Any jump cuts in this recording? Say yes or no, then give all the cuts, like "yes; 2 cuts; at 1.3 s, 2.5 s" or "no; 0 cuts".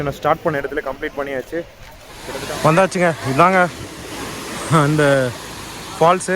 yes; 1 cut; at 2.2 s